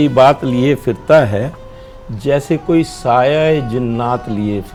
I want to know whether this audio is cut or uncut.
uncut